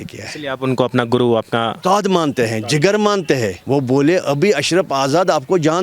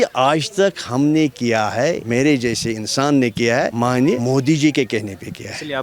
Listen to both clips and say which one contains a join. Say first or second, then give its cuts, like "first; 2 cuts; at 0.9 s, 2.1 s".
first; 1 cut; at 1.7 s